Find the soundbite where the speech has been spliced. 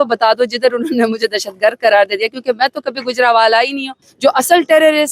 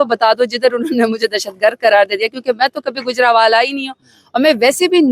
first; 1 cut; at 4.0 s

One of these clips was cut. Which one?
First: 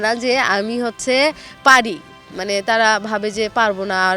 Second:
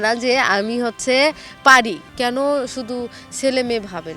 second; 1 cut; at 2.1 s

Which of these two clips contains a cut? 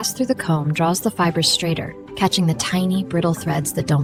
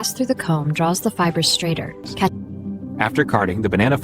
second; 1 cut; at 2.3 s

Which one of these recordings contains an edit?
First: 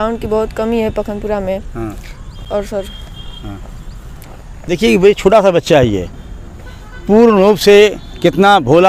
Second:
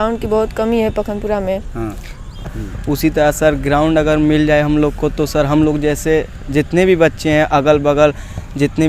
second; 1 cut; at 2.5 s

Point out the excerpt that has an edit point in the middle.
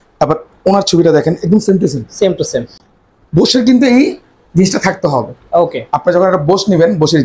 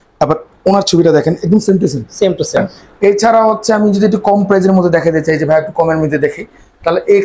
second; 1 cut; at 2.8 s

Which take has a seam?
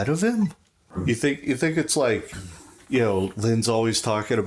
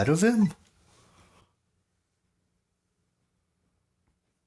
first; 1 cut; at 0.9 s

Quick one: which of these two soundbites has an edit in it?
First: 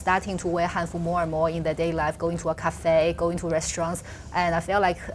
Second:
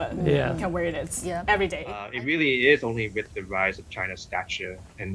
second; 1 cut; at 2.1 s

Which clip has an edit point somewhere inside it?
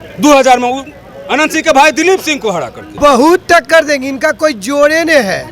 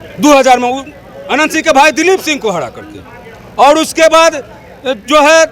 first; 1 cut; at 2.9 s

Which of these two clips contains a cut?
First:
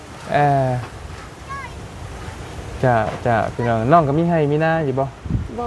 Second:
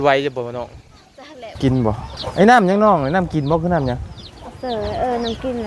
second; 1 cut; at 1.6 s

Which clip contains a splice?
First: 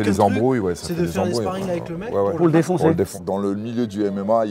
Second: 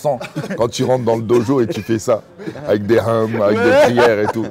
first; 1 cut; at 3.2 s

